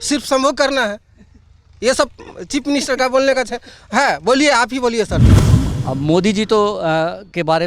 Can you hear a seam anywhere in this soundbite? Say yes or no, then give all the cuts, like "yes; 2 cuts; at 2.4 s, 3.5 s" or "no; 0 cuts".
yes; 1 cut; at 5.4 s